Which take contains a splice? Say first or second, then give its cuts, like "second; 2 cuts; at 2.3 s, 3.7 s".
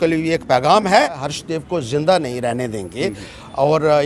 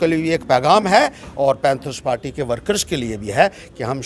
first; 1 cut; at 1.2 s